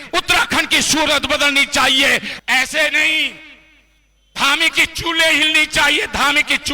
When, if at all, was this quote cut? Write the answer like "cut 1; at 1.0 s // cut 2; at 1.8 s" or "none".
cut 1; at 2.3 s